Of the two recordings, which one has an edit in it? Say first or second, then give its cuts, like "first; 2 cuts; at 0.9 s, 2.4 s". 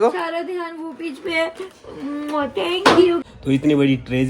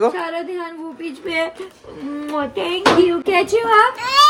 first; 1 cut; at 3.2 s